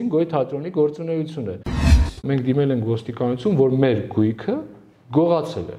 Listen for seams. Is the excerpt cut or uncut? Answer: cut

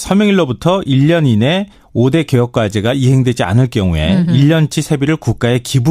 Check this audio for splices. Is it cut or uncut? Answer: cut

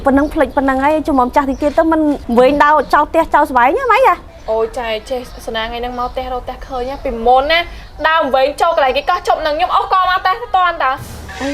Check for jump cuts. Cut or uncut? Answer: cut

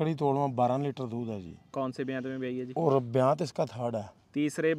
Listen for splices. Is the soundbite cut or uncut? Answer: uncut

